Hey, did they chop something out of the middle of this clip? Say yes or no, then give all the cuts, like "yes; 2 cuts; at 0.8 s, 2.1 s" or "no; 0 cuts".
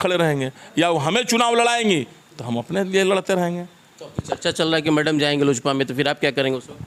no; 0 cuts